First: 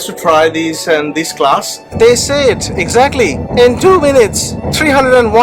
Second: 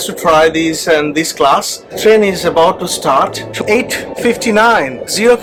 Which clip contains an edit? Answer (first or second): first